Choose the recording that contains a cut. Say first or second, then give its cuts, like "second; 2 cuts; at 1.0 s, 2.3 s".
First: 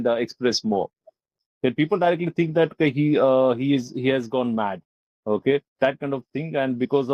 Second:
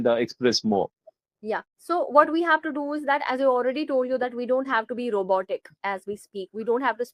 first; 1 cut; at 1.4 s